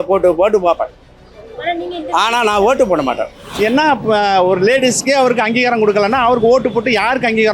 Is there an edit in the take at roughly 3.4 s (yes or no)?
yes